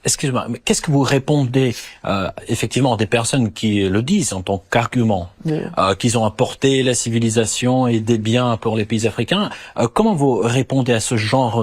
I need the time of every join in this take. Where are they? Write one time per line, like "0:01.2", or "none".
0:05.3

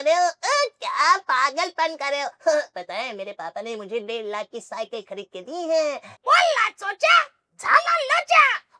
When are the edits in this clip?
0:06.1

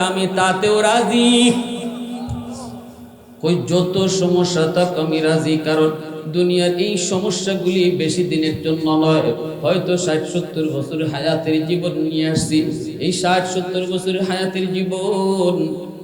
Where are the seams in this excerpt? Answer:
none

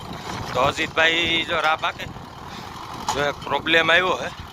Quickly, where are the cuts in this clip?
0:02.1

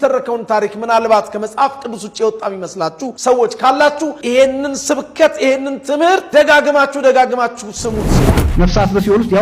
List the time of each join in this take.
0:08.2

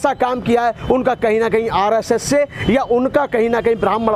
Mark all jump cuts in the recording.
none

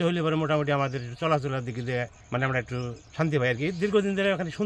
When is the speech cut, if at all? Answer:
0:02.2
0:03.0

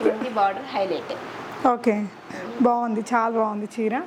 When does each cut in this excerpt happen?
none

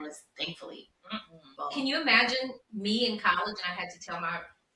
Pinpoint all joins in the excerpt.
0:01.5
0:02.6

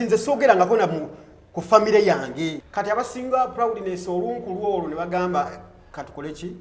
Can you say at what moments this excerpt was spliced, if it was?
0:02.6

